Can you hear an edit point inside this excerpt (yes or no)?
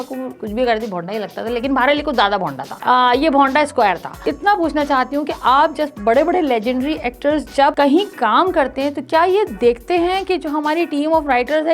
yes